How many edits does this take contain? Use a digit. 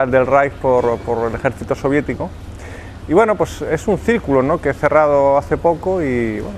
1